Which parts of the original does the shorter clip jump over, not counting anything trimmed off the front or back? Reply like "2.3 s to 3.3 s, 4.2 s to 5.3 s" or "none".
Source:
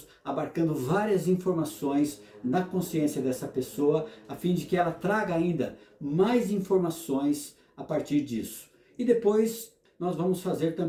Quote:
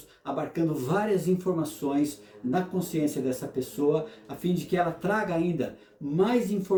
none